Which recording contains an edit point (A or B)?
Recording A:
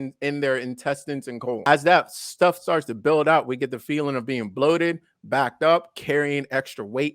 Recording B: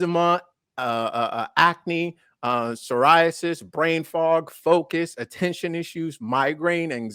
A